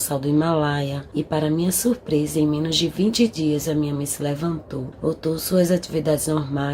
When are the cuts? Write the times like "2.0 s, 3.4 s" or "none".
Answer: 1.0 s, 4.9 s